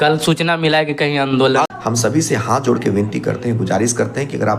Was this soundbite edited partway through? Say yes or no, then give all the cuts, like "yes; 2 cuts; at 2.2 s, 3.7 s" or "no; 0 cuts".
yes; 1 cut; at 1.7 s